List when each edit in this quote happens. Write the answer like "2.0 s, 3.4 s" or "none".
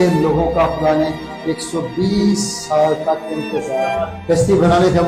4.2 s